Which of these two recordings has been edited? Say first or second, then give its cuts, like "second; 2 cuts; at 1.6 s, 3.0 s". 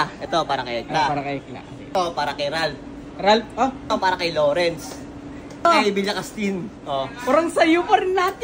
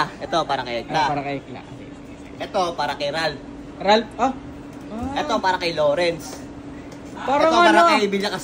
first; 3 cuts; at 1.9 s, 3.9 s, 5.7 s